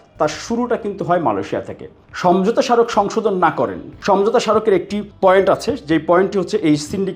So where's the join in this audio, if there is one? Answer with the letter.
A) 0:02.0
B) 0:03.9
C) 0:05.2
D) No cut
A